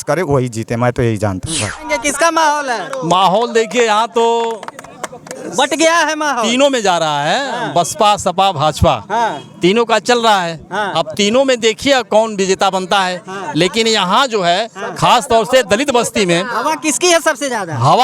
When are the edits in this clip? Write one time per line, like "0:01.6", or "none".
0:01.8

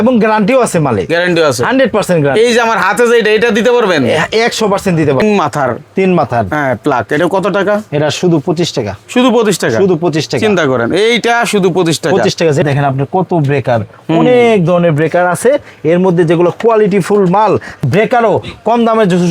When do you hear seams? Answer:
0:05.2
0:12.6
0:17.7

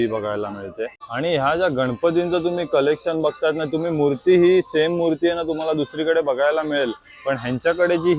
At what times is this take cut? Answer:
none

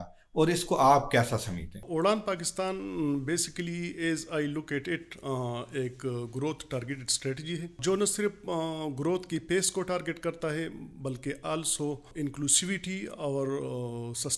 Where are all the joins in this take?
0:01.8
0:07.8
0:12.1

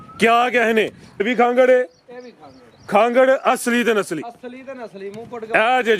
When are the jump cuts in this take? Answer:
0:01.2

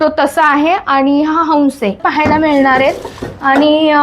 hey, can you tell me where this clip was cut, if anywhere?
0:02.0

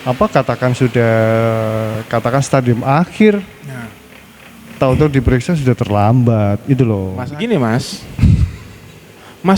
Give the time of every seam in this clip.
0:07.3

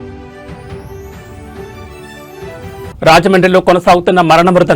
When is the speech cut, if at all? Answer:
0:01.4
0:02.7

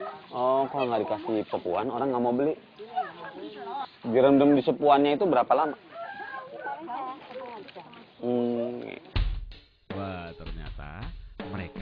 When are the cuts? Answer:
none

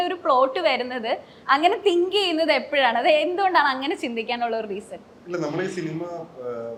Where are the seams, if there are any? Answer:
none

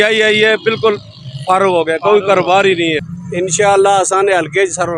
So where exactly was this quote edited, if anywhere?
0:03.2

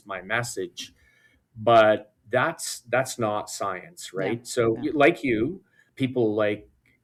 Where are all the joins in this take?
none

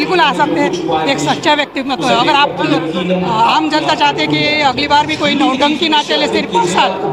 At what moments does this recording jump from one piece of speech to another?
none

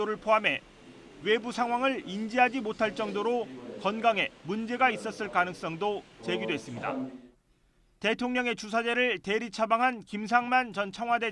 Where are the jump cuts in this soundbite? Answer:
0:09.5

